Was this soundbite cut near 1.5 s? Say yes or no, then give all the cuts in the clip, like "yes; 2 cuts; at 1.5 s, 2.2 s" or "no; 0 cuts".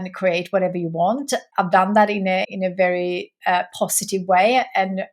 yes; 2 cuts; at 1.5 s, 2.5 s